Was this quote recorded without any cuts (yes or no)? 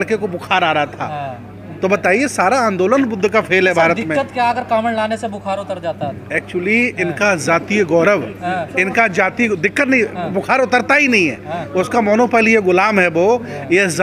yes